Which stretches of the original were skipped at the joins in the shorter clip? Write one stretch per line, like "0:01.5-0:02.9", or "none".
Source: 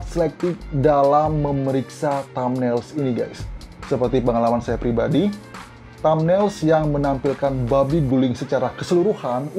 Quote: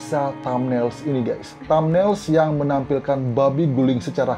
0:03.4-0:05.8